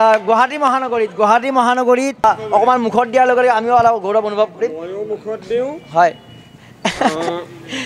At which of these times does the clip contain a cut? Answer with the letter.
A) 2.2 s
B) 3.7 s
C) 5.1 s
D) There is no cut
A